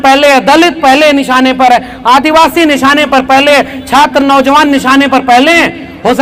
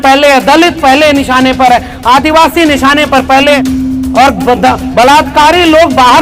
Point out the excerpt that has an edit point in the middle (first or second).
second